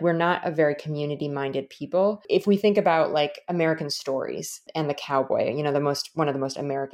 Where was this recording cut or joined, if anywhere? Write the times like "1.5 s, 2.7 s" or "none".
2.2 s, 4.7 s